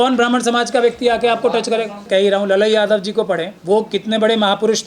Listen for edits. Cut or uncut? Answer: cut